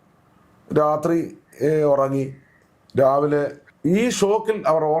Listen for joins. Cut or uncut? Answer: cut